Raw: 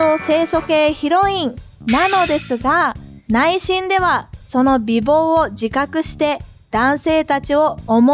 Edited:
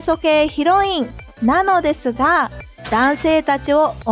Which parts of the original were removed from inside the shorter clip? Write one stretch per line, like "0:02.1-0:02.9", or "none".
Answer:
0:03.1-0:06.5